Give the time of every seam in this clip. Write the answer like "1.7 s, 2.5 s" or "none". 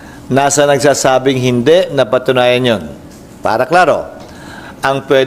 none